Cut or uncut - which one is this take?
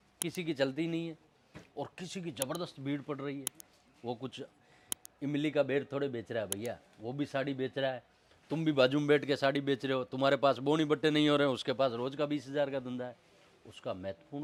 uncut